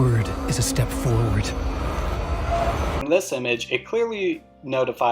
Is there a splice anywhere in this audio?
no; 0 cuts

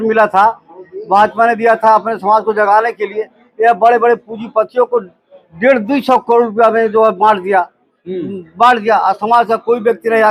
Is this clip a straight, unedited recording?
yes; 0 cuts

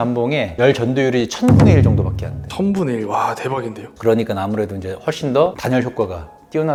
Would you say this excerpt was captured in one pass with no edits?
yes; 0 cuts

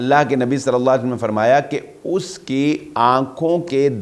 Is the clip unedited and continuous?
yes; 0 cuts

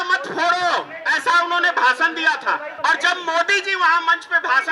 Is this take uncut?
no; 2 cuts; at 1.0 s, 2.7 s

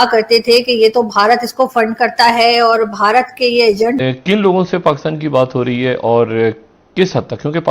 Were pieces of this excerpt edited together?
yes; 1 cut; at 4.0 s

